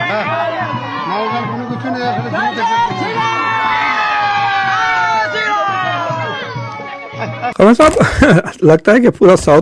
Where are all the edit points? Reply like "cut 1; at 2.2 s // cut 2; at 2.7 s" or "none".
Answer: cut 1; at 7.5 s